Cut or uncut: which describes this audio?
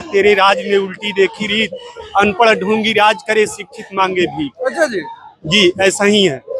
uncut